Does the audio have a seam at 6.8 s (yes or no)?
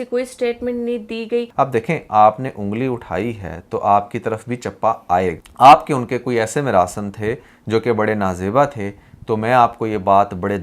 no